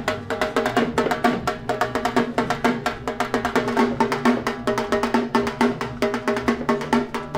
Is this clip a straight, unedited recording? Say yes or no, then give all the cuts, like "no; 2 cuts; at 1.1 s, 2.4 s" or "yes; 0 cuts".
yes; 0 cuts